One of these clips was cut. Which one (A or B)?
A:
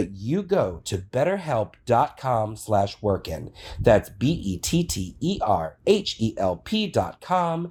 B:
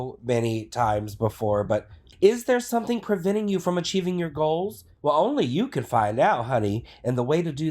B